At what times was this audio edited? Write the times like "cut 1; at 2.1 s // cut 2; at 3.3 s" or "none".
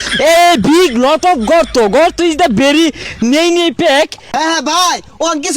cut 1; at 4.2 s